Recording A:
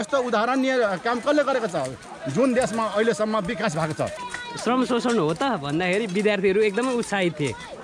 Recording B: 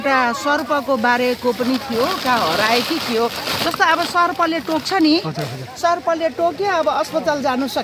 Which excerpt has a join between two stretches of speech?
A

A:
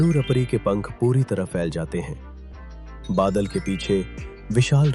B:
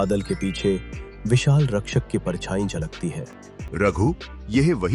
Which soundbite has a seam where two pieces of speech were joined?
B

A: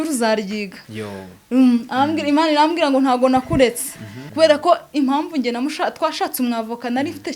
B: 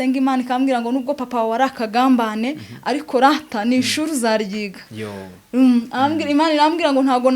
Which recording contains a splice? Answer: A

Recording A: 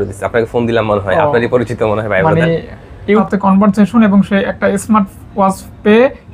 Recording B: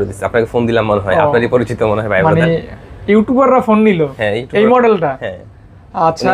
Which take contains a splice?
A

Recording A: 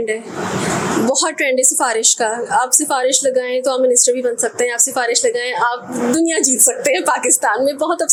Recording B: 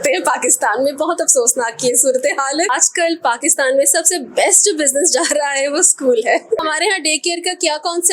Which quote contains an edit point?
B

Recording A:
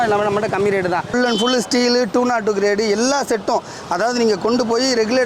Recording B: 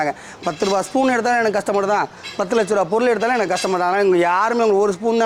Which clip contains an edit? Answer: A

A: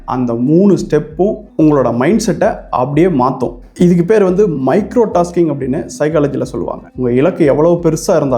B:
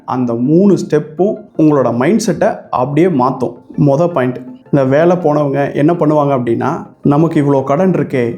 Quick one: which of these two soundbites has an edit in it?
A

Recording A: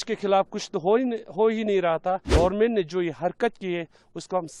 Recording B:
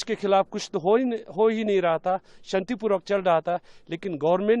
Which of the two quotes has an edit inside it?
A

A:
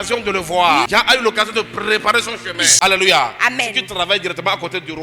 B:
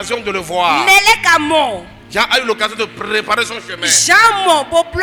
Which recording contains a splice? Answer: A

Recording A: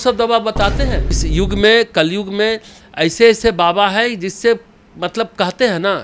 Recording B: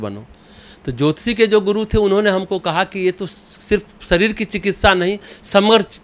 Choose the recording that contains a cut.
A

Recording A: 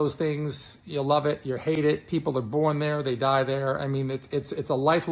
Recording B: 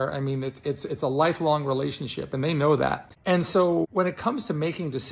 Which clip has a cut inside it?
B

